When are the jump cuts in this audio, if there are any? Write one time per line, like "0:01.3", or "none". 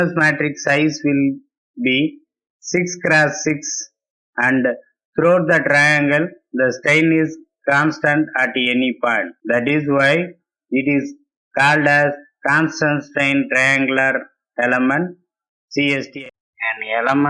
0:16.1